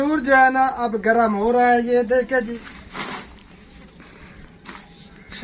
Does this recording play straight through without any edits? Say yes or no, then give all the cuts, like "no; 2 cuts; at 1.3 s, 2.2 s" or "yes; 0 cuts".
yes; 0 cuts